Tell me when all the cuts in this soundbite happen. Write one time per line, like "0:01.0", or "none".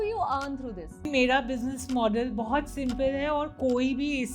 0:01.1